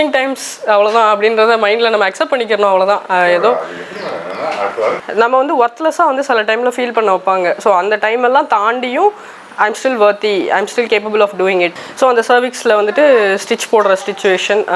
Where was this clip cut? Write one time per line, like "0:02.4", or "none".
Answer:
0:05.0
0:11.7